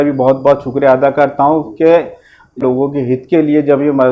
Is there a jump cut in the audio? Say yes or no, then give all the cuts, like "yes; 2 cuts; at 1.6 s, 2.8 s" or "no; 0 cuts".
yes; 1 cut; at 2.6 s